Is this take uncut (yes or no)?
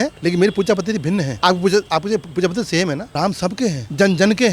no